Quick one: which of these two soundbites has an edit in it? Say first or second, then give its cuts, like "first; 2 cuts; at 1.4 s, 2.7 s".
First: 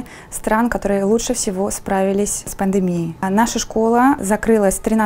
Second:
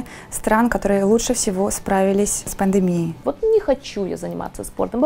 second; 1 cut; at 3.2 s